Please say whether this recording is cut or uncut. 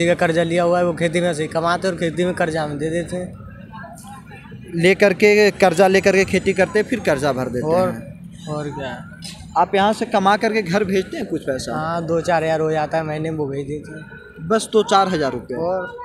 uncut